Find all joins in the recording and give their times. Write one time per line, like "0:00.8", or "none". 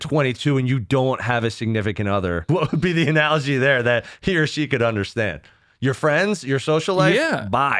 0:02.4